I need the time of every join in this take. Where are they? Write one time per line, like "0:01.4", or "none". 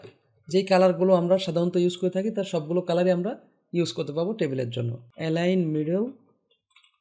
0:05.0